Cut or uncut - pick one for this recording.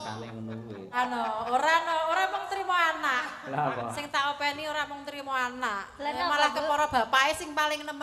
cut